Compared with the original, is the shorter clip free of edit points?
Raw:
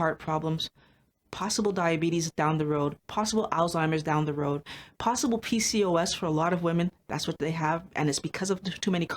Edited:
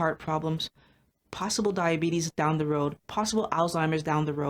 yes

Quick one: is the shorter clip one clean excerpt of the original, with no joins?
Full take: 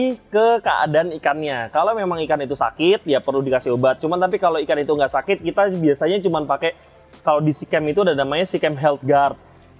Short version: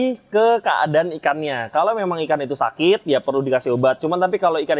yes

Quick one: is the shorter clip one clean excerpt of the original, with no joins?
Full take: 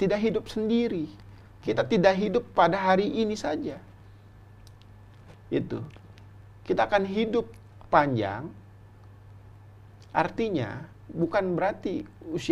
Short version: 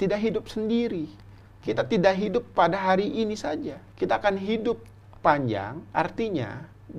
no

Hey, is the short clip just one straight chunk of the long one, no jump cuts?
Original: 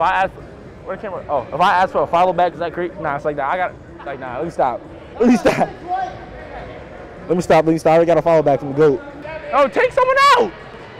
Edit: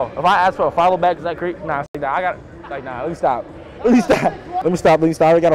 no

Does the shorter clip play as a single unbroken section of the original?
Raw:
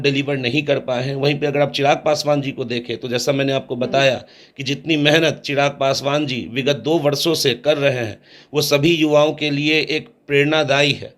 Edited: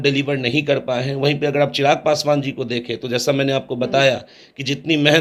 yes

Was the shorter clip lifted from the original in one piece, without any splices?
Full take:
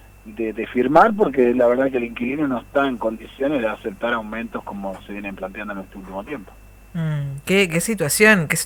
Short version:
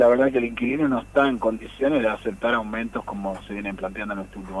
yes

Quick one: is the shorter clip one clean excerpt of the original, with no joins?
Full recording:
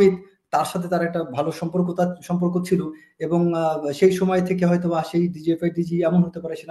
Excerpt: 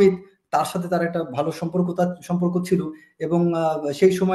yes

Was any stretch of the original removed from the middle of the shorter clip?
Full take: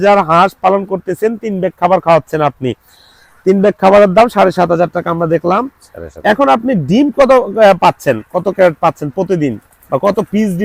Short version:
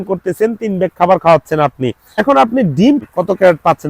yes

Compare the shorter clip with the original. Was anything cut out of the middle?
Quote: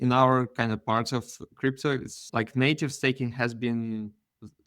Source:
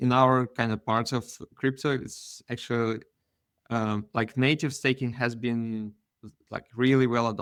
yes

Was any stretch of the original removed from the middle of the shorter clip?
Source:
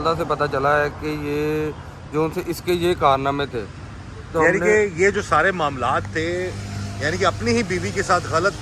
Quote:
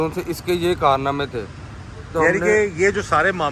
no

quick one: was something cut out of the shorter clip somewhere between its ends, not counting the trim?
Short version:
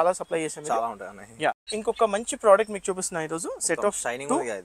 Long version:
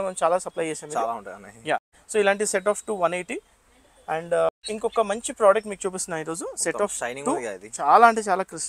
yes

